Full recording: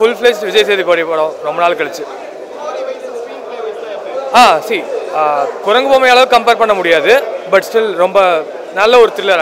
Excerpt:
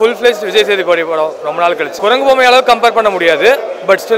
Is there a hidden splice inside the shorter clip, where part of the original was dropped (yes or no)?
yes